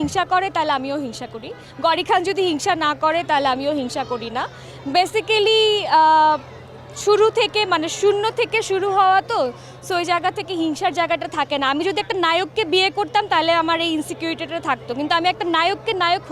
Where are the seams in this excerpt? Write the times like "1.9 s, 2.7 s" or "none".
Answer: none